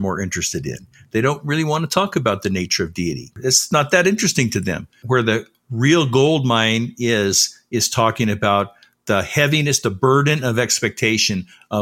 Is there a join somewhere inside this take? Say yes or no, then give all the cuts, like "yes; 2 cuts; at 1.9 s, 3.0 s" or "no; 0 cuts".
yes; 2 cuts; at 3.3 s, 5.0 s